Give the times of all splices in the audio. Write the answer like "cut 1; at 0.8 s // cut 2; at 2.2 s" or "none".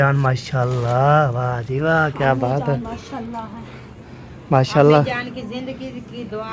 none